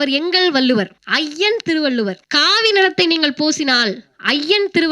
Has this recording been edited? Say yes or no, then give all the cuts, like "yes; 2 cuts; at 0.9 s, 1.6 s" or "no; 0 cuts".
yes; 2 cuts; at 1.0 s, 2.3 s